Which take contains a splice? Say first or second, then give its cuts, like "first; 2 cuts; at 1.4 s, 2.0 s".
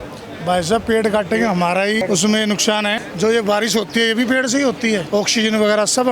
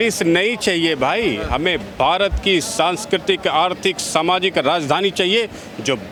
first; 3 cuts; at 2.0 s, 3.0 s, 5.0 s